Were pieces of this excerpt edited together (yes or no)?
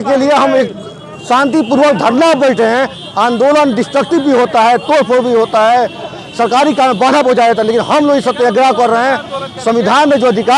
no